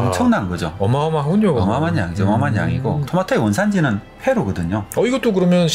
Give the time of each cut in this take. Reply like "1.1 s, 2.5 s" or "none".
3.0 s, 4.1 s